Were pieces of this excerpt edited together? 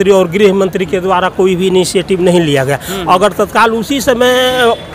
no; 0 cuts

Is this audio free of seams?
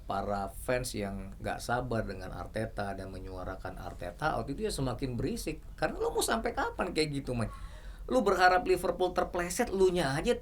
yes; 0 cuts

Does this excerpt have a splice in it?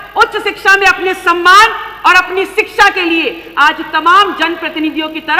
no; 0 cuts

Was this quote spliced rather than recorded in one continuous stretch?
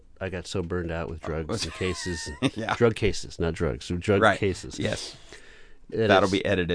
no; 0 cuts

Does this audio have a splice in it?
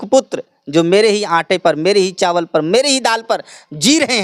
no; 0 cuts

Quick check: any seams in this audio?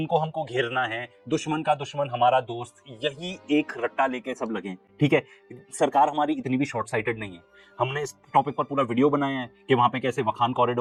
no; 0 cuts

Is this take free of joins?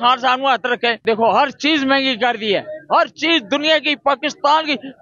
no; 1 cut; at 1.0 s

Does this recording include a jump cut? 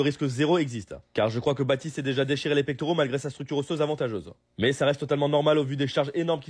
yes; 1 cut; at 2.0 s

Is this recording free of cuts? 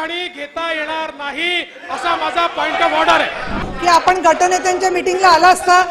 no; 1 cut; at 3.7 s

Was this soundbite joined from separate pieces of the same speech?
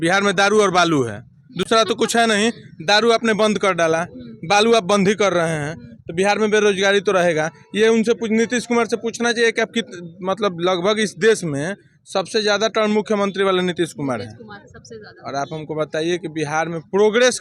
no; 0 cuts

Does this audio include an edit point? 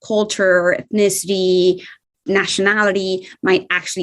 yes; 1 cut; at 1.9 s

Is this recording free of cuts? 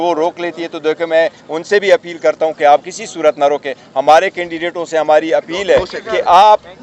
yes; 0 cuts

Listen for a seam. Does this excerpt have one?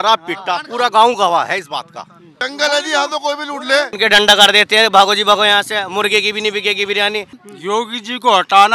yes; 3 cuts; at 2.4 s, 3.9 s, 7.4 s

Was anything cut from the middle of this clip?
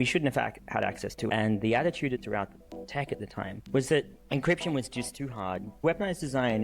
yes; 5 cuts; at 1.2 s, 2.2 s, 3.6 s, 4.2 s, 5.8 s

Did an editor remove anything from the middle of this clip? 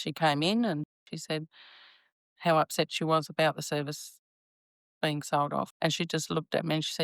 yes; 2 cuts; at 1.0 s, 5.7 s

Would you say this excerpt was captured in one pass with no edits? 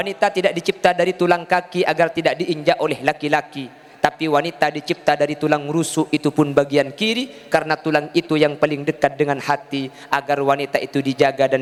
yes; 0 cuts

